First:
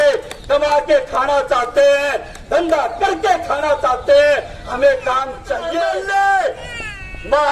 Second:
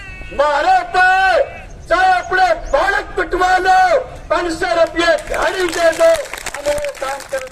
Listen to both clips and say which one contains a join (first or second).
first